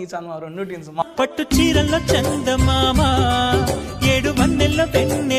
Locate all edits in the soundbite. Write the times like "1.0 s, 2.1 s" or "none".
1.0 s